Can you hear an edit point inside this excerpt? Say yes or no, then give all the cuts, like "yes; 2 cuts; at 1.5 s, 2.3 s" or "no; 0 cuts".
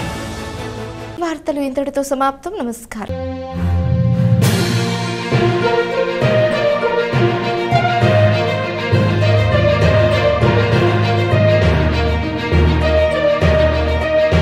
no; 0 cuts